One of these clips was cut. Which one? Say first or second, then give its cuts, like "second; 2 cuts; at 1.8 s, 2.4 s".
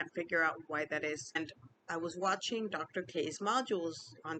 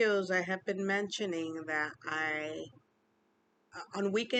first; 1 cut; at 1.4 s